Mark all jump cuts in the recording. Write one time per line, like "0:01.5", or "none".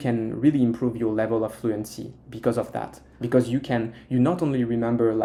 none

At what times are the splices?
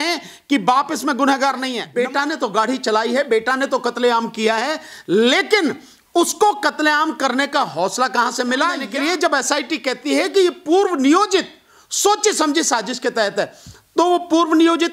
0:01.8
0:08.8

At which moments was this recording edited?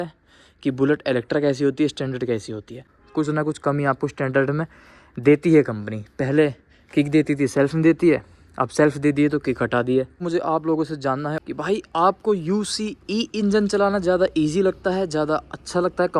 0:02.9
0:10.2
0:11.5

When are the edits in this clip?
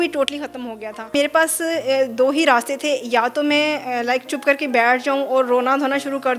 0:01.1

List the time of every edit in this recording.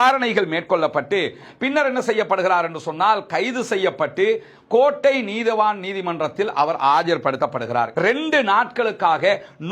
0:07.9

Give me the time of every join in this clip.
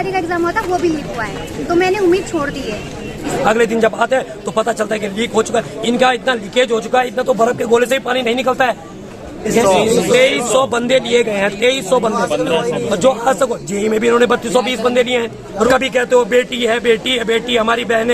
0:03.3
0:09.5
0:15.7

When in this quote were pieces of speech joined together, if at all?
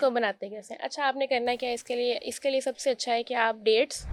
none

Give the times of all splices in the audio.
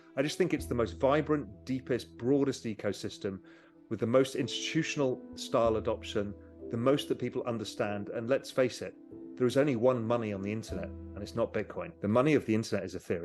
0:11.9

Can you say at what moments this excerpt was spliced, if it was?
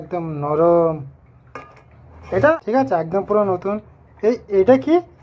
0:02.6

